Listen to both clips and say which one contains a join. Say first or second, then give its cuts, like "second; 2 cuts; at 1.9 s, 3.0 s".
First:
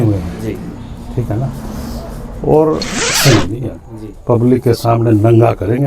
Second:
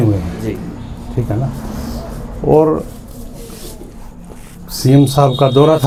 first; 1 cut; at 3.2 s